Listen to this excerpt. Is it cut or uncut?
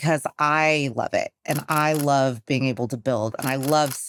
uncut